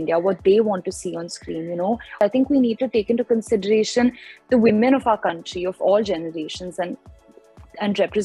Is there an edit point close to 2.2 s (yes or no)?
yes